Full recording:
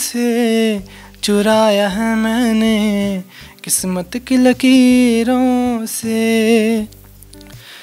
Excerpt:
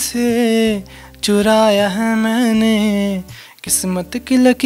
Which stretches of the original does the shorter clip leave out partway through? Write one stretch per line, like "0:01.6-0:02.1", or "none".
none